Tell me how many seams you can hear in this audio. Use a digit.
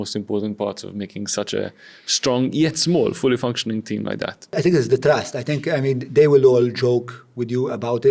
1